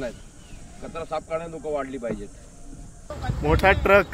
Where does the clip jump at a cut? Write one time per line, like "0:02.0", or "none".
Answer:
0:03.1